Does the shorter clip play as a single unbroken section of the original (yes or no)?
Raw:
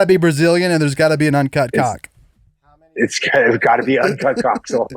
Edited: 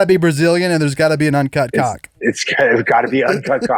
no